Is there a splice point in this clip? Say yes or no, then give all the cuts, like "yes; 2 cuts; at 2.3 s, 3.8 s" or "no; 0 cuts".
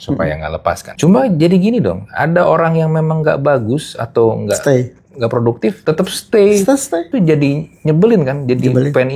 yes; 3 cuts; at 0.9 s, 5.8 s, 7.1 s